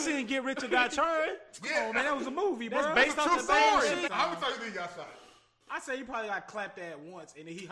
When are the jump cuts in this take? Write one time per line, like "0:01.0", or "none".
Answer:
0:04.1